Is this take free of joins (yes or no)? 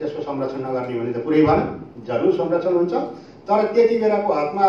yes